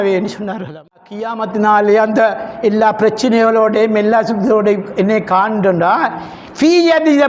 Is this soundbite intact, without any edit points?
no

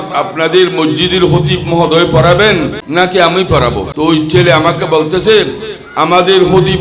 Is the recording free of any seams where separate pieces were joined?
no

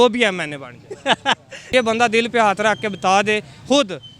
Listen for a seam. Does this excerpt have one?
yes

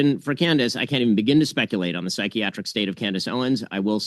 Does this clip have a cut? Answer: no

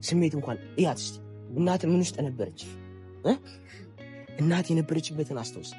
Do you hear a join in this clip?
no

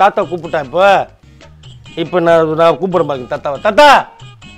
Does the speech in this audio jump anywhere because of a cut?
no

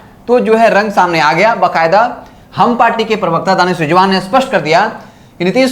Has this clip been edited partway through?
no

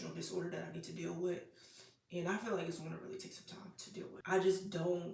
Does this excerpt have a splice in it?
yes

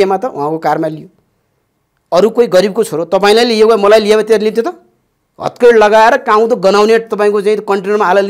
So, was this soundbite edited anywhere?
no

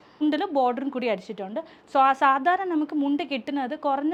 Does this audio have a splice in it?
no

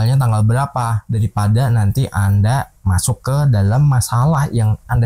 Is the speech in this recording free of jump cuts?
no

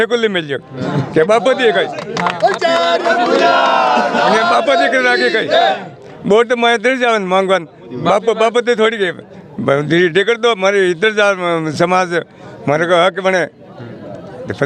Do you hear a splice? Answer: no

